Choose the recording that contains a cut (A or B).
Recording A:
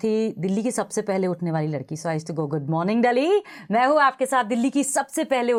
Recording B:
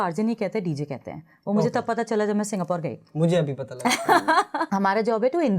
B